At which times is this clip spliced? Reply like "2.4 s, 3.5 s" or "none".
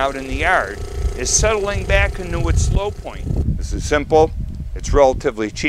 3.4 s